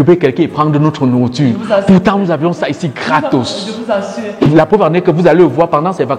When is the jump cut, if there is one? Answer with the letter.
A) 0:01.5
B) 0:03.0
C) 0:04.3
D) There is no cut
C